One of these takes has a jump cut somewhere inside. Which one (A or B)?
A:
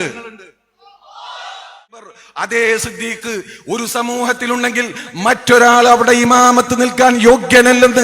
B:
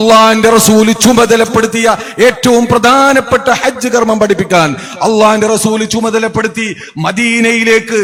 A